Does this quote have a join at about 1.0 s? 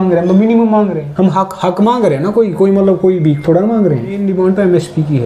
yes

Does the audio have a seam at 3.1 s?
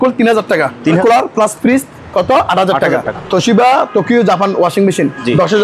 yes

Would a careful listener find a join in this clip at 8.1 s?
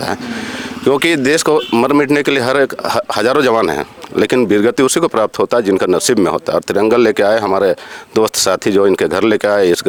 no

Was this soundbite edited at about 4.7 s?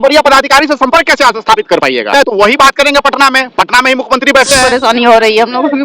yes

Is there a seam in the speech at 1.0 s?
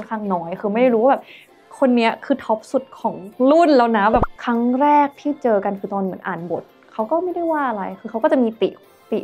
no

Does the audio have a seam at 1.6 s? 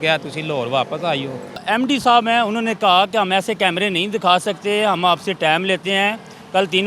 yes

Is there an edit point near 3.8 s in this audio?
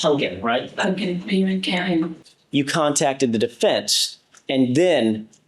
no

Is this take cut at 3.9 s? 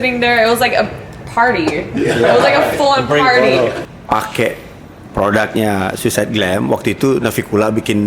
yes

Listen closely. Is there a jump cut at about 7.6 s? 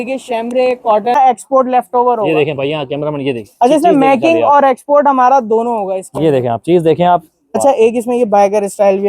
yes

